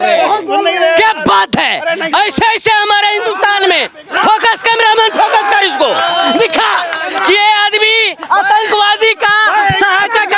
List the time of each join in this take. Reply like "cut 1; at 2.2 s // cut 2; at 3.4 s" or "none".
none